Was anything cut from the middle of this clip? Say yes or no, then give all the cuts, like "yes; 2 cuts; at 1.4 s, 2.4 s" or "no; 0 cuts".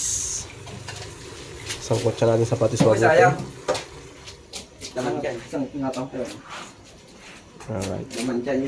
no; 0 cuts